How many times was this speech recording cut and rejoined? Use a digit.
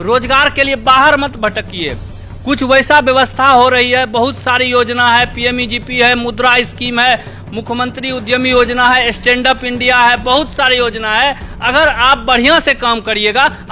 0